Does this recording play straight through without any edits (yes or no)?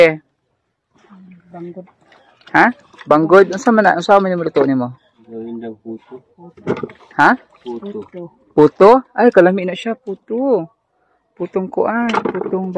yes